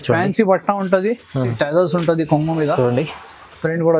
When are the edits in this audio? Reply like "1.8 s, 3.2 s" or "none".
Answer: 1.5 s

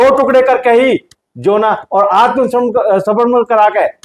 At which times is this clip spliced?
none

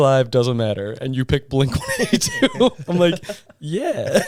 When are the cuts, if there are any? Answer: none

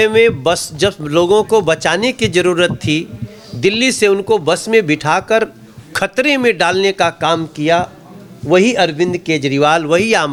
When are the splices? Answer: none

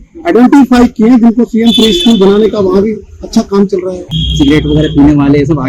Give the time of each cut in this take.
4.0 s

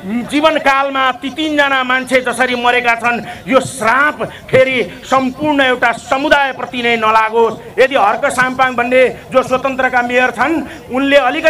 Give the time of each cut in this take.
7.6 s

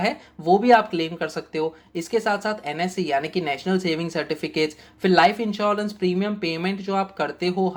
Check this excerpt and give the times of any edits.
none

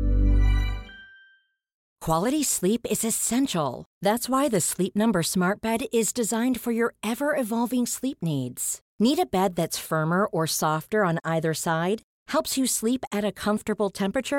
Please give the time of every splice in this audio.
1.9 s

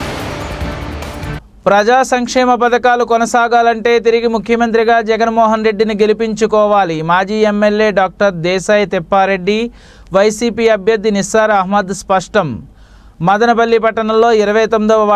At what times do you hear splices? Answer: 1.4 s

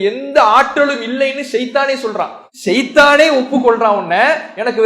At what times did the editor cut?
2.4 s

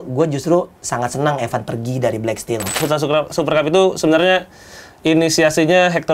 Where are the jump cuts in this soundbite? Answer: 2.8 s

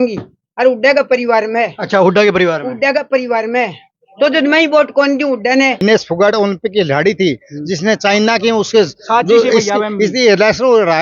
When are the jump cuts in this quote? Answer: 5.8 s

